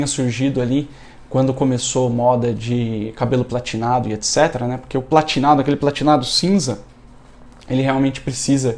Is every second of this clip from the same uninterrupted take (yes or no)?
yes